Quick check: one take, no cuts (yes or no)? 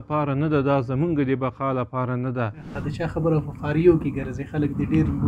no